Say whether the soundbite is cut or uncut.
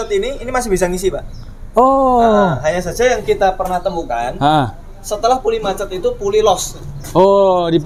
uncut